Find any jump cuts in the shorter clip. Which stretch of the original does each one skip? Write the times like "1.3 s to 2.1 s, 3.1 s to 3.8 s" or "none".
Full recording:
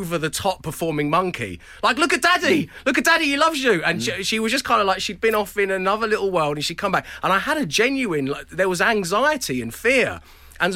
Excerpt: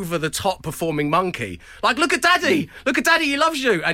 none